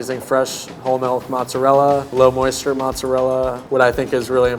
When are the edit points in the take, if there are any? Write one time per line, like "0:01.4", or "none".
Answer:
0:02.1
0:03.6